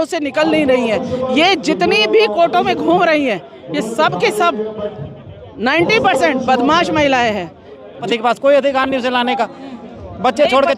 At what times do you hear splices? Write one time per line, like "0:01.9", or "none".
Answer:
0:08.0